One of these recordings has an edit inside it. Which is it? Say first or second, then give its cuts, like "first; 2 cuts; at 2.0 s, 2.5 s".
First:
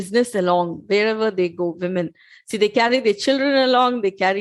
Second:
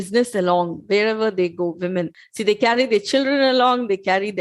second; 1 cut; at 2.2 s